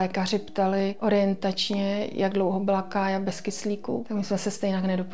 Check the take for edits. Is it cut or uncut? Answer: cut